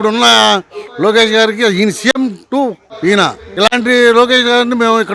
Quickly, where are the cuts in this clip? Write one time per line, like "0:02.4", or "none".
none